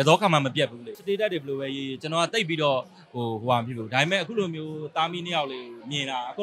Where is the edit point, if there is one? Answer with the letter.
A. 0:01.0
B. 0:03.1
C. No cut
A